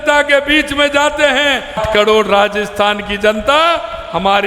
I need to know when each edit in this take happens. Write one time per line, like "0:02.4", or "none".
0:01.8